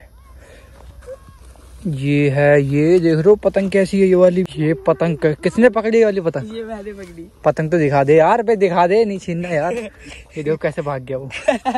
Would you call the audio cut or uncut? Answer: cut